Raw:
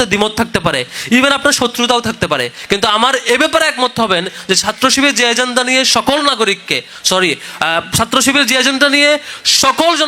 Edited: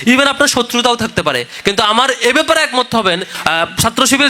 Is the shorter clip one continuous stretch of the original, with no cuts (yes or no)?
no